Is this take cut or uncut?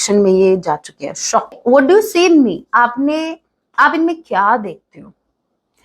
cut